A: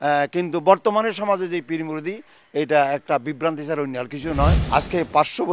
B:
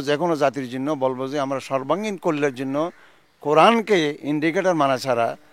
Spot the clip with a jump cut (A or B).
A